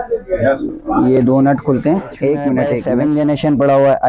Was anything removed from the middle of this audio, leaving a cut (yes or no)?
yes